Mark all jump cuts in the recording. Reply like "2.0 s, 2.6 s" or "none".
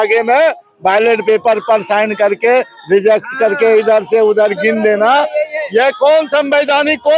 none